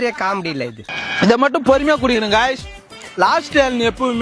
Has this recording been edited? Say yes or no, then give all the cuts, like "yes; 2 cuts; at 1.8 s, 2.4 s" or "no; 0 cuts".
yes; 1 cut; at 1.0 s